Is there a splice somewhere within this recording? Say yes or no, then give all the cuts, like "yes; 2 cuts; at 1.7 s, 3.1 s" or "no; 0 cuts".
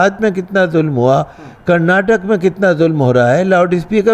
no; 0 cuts